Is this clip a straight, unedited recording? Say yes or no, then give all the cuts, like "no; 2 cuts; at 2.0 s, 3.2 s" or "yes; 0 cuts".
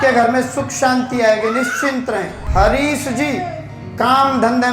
no; 1 cut; at 2.4 s